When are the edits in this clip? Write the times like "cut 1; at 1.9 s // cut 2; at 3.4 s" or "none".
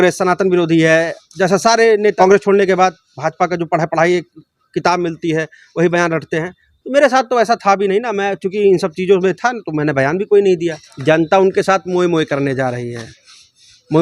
cut 1; at 2.1 s // cut 2; at 10.9 s